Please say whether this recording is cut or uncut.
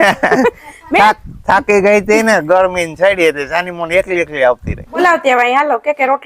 cut